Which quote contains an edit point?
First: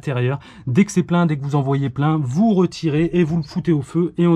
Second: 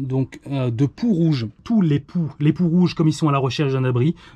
second; 1 cut; at 1.6 s

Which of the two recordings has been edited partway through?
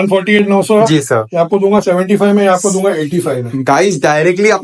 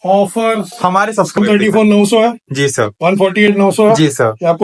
second; 1 cut; at 1.4 s

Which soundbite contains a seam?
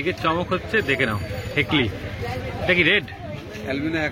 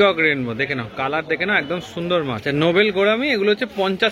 second; 1 cut; at 2.4 s

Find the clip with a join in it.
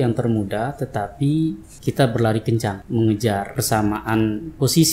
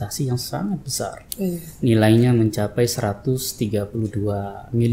first; 3 cuts; at 1.7 s, 2.8 s, 3.5 s

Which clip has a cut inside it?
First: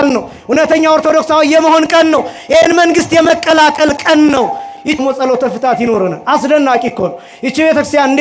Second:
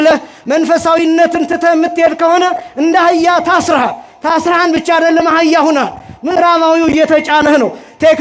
first; 1 cut; at 5.0 s

